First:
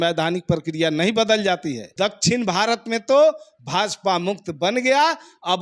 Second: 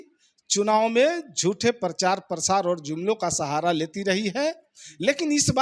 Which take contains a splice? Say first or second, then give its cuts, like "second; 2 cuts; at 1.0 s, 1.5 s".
first; 1 cut; at 1.8 s